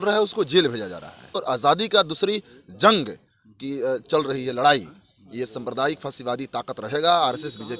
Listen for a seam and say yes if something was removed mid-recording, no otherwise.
yes